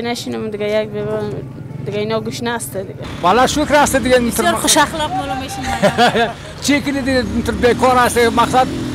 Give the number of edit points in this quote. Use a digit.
1